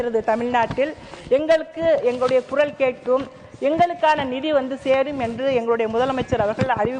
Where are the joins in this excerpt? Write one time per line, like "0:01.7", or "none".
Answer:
none